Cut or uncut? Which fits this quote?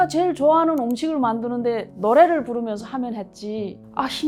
uncut